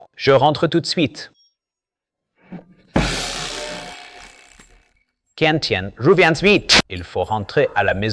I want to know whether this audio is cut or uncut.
uncut